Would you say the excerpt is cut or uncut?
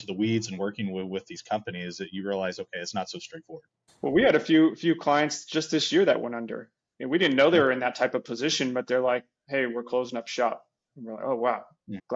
uncut